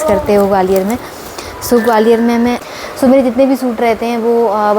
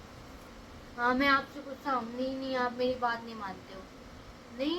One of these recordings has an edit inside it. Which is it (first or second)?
first